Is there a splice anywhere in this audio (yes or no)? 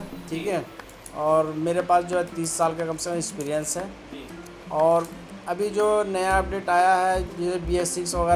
no